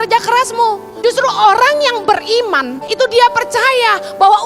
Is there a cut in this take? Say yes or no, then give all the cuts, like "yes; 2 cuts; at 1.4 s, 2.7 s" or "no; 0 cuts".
yes; 2 cuts; at 0.9 s, 2.8 s